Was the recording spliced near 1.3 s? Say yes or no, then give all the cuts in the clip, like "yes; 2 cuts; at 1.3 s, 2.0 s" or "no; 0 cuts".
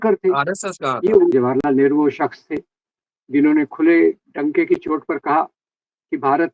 yes; 1 cut; at 1.3 s